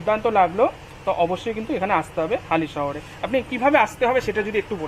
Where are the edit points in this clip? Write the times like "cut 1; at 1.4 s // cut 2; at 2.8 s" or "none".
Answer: none